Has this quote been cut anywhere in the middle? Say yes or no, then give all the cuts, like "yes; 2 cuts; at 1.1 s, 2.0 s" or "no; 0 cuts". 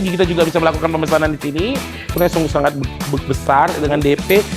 yes; 1 cut; at 2.1 s